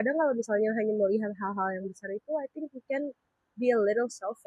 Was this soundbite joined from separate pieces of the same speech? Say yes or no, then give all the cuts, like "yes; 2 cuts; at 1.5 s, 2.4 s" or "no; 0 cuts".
no; 0 cuts